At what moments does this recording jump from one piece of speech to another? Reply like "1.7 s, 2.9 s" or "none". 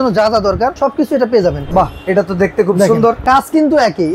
0.7 s, 1.6 s, 3.2 s